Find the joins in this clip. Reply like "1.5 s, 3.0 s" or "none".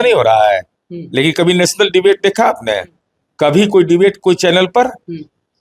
none